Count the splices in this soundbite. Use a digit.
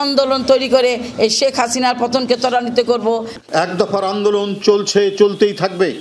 1